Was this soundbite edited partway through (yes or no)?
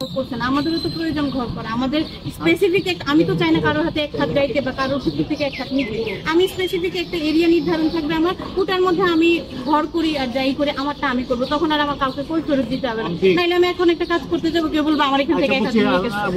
no